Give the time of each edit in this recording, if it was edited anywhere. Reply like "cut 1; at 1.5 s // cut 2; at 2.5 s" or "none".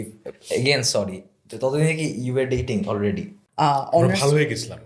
cut 1; at 3.3 s